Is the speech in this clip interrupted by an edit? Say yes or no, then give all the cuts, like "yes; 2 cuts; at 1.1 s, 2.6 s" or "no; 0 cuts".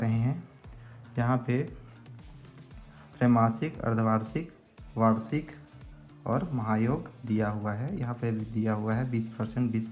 no; 0 cuts